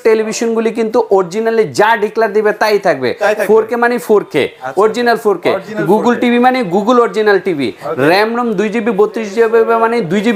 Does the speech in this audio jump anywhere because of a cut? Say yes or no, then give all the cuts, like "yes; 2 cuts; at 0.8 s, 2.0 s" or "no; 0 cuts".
no; 0 cuts